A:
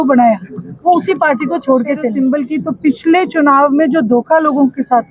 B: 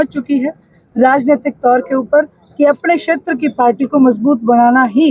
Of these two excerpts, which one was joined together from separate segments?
A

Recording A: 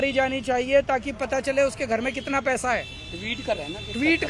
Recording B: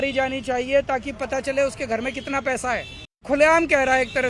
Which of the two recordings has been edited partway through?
B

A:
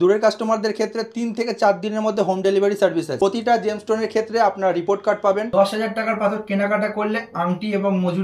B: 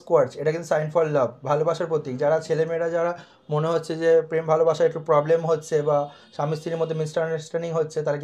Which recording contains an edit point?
A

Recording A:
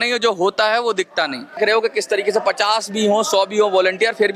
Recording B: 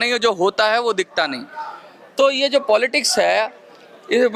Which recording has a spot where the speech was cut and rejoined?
A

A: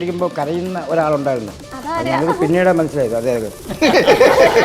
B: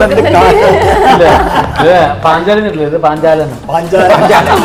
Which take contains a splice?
A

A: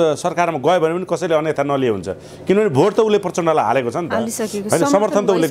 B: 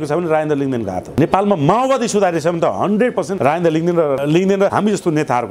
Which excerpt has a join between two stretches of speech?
B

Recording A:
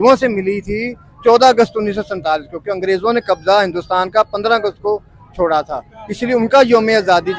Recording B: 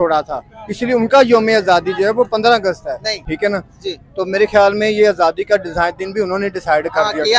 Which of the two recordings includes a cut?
B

